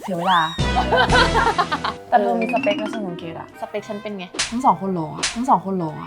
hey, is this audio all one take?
no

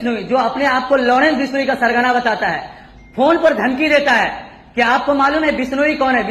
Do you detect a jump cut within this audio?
no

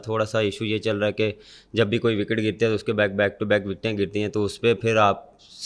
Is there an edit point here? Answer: no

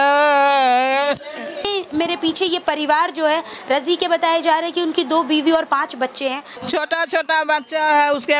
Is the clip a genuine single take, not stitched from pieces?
no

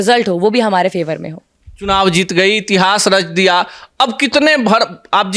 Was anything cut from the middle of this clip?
no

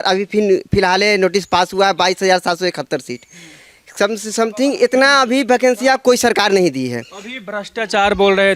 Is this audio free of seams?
yes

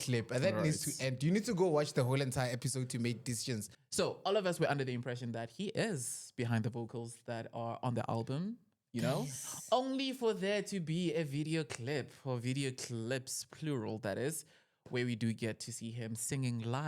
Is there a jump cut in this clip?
yes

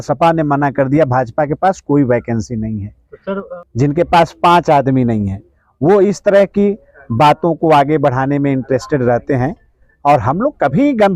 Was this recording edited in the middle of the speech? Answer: yes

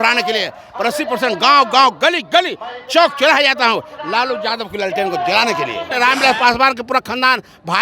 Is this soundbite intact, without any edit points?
no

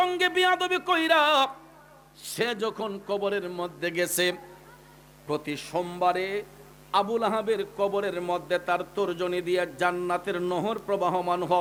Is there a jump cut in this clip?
no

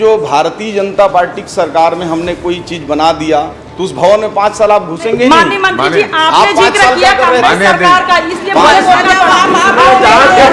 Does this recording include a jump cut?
no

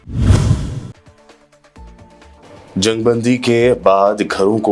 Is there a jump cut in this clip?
yes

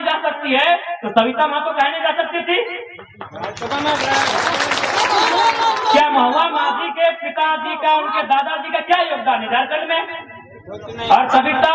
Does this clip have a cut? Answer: no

